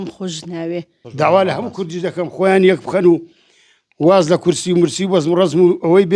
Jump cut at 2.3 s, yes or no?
no